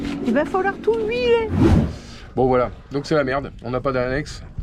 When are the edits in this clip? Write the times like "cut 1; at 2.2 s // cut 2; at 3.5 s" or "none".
cut 1; at 1.7 s